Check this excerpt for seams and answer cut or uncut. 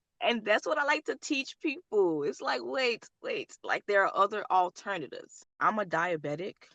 cut